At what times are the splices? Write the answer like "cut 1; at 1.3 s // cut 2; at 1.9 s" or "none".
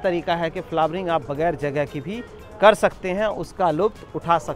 none